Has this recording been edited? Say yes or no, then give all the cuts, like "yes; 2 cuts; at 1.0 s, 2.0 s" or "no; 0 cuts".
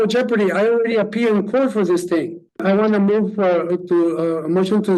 yes; 1 cut; at 2.6 s